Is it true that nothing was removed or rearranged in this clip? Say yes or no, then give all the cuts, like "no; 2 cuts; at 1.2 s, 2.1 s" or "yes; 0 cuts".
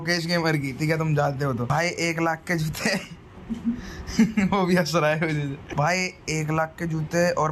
yes; 0 cuts